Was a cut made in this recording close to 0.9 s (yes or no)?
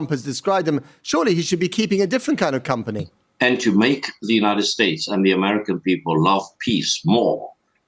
no